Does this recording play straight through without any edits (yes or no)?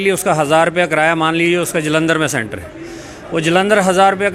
yes